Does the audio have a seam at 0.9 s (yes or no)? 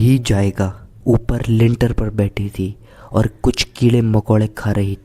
yes